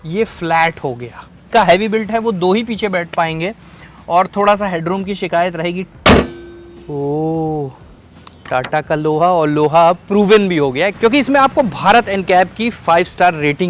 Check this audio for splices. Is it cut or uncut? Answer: cut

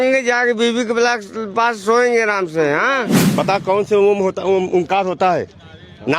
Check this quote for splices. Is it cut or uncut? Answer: cut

